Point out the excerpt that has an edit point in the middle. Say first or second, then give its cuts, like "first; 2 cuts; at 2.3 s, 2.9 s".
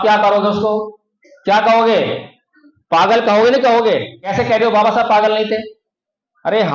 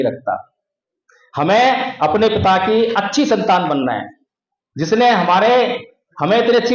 first; 1 cut; at 4.2 s